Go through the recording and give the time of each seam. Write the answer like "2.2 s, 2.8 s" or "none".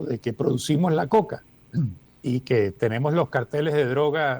2.0 s